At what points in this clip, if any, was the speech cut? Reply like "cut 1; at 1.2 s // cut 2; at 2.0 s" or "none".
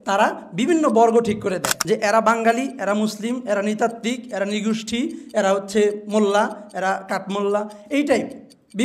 cut 1; at 1.7 s